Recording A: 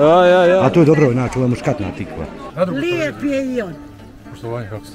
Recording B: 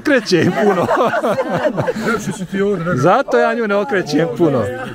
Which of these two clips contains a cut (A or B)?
A